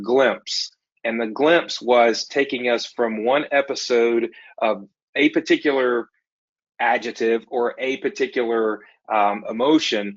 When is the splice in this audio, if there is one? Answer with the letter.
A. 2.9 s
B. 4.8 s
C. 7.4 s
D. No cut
D